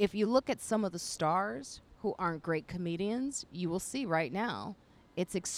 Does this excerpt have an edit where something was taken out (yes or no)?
no